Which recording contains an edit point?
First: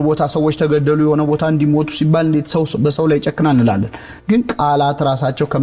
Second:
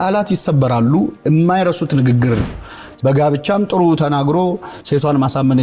second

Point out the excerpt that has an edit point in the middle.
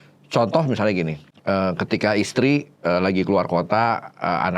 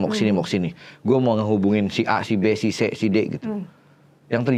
first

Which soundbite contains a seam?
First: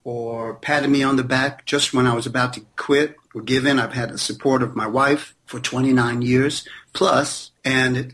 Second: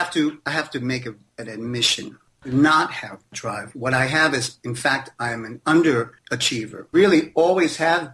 second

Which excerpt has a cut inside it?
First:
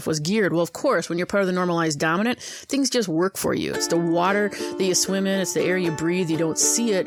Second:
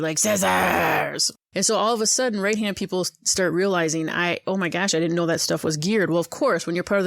second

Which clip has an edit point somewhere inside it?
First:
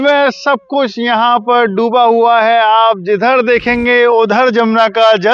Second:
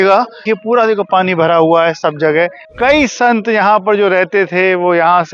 second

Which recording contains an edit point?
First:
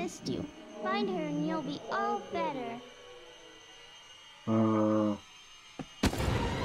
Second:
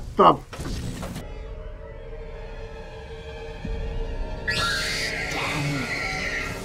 second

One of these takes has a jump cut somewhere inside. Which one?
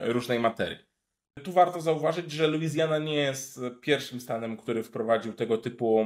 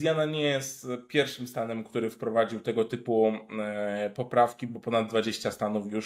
first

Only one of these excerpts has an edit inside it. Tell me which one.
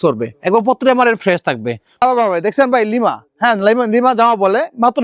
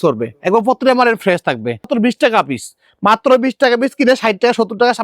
second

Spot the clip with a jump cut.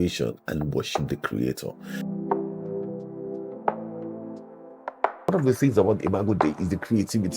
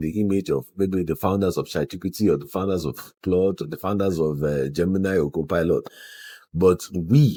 first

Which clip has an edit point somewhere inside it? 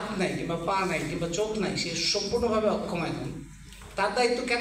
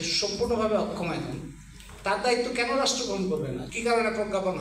second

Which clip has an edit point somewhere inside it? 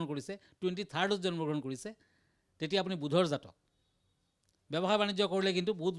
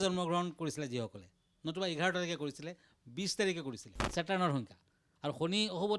second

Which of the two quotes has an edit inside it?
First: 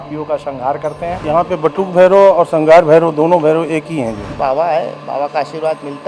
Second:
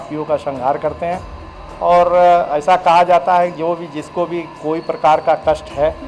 first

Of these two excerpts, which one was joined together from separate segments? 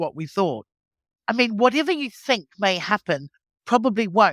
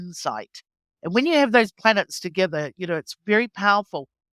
first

